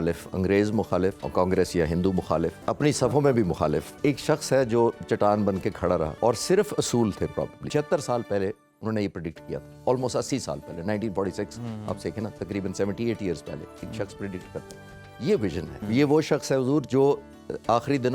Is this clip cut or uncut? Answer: cut